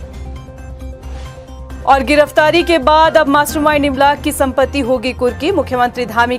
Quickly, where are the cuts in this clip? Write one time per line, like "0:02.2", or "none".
0:01.2